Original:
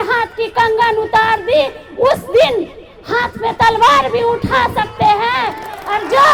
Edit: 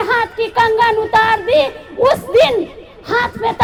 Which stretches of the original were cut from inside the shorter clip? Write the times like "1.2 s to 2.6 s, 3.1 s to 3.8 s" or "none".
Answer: none